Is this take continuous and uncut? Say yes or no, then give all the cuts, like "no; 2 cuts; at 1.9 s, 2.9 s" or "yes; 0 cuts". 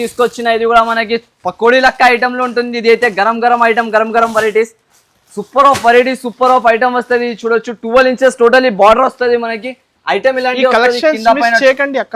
yes; 0 cuts